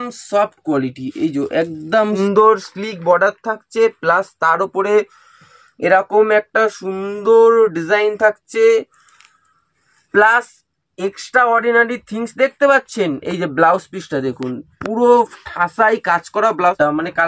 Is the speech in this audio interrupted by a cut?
yes; 2 cuts; at 2.0 s, 16.6 s

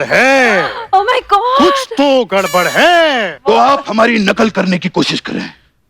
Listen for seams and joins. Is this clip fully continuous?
no; 1 cut; at 3.3 s

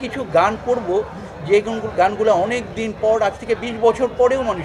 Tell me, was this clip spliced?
no; 0 cuts

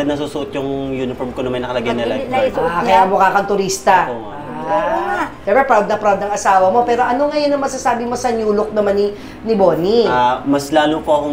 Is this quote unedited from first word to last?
yes; 0 cuts

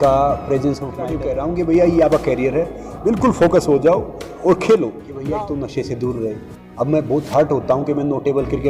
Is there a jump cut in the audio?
yes; 2 cuts; at 1.1 s, 5.1 s

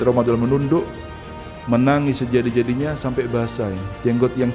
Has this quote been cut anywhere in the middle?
no; 0 cuts

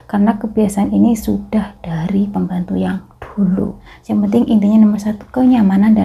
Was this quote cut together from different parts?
yes; 1 cut; at 3.9 s

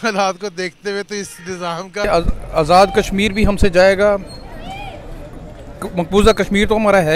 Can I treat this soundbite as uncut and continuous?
no; 1 cut; at 2.1 s

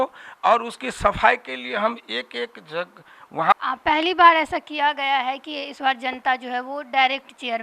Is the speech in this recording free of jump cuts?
no; 1 cut; at 3.5 s

